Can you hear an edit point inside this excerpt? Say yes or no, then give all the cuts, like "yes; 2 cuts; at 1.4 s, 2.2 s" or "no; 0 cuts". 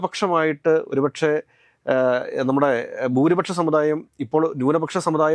no; 0 cuts